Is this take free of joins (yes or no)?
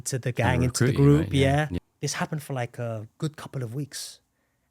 no